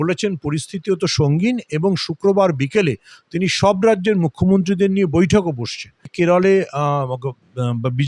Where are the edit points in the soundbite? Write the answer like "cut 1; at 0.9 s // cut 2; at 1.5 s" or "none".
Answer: cut 1; at 6.1 s